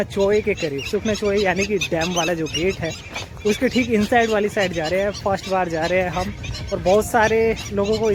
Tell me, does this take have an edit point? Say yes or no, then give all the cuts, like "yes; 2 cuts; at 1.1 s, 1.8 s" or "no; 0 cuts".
no; 0 cuts